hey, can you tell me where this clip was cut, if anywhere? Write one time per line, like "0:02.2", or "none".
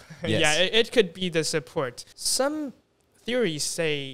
0:02.1